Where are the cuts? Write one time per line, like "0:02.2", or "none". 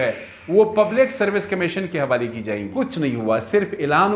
0:02.7